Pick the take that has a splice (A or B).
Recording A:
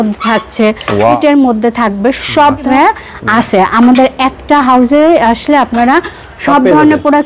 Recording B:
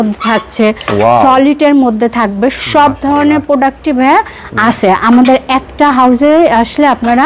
A